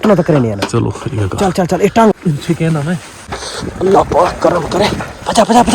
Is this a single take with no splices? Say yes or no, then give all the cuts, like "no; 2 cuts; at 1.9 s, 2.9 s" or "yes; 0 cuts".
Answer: no; 1 cut; at 3.3 s